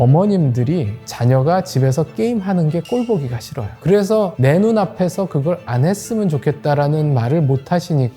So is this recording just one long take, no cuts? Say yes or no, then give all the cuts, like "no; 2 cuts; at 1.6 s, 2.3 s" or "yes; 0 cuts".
no; 2 cuts; at 1.0 s, 3.8 s